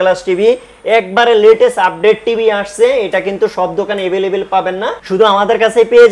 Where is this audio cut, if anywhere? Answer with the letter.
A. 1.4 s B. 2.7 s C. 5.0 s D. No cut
C